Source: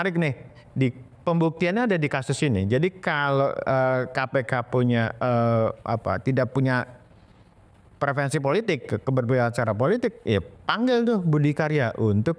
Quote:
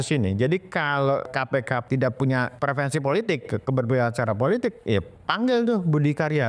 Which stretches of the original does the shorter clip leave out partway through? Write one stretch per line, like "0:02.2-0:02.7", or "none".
0:03.7-0:05.7
0:06.9-0:07.9